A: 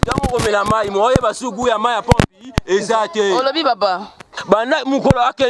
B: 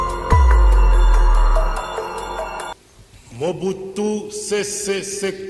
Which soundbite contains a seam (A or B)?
A